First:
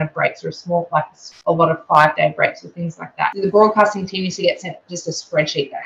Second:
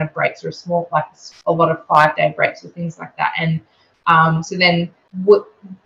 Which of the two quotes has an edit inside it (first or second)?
first